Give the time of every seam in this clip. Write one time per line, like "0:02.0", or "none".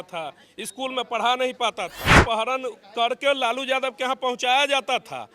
0:02.2